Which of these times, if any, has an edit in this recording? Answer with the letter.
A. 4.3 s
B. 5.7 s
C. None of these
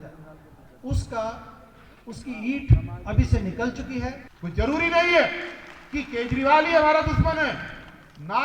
A